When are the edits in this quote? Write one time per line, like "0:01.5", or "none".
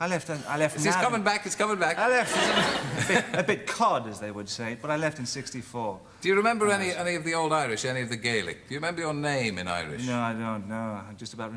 none